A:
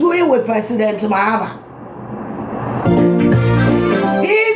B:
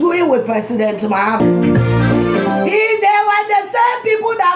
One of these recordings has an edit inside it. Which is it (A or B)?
B